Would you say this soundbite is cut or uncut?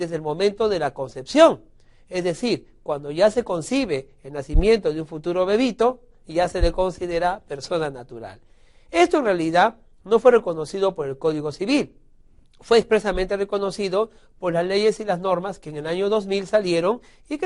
uncut